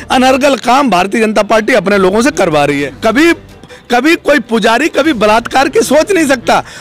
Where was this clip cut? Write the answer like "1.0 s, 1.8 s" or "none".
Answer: 2.9 s